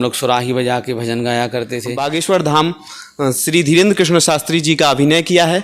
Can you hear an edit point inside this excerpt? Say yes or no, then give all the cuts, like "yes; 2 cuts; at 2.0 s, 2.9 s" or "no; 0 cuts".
yes; 1 cut; at 1.9 s